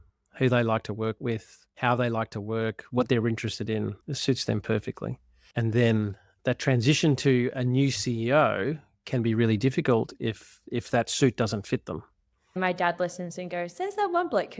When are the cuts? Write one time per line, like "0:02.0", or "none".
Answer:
0:01.2
0:04.0
0:12.2